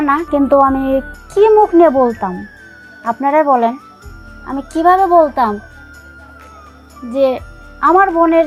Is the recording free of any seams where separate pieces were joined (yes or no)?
yes